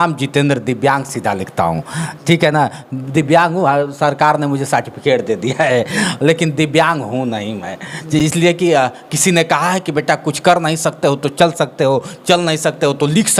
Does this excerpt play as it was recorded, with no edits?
yes; 0 cuts

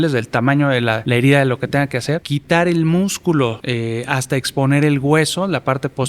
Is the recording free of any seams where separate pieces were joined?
no; 3 cuts; at 1.0 s, 2.3 s, 3.6 s

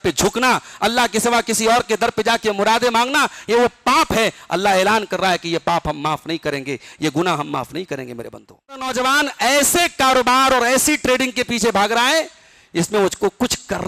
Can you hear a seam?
yes; 1 cut; at 8.9 s

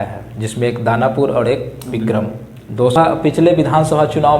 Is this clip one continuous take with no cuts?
no; 1 cut; at 3.0 s

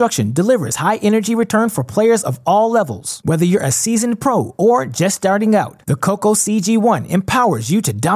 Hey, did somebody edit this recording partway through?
no; 0 cuts

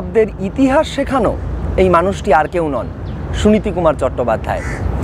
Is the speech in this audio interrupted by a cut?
no; 0 cuts

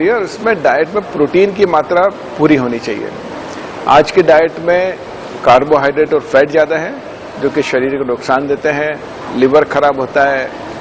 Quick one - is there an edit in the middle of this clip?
no; 0 cuts

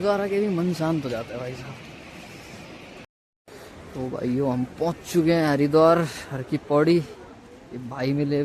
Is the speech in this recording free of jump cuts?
no; 1 cut; at 3.0 s

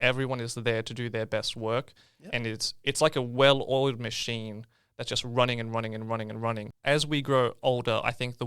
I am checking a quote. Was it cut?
yes; 1 cut; at 6.7 s

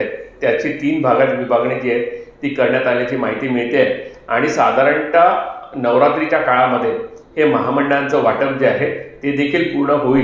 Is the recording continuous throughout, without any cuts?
yes; 0 cuts

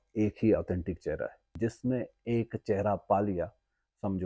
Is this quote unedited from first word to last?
no; 1 cut; at 1.5 s

